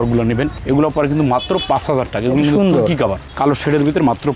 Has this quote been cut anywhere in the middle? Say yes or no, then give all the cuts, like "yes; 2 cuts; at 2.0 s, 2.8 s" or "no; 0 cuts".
no; 0 cuts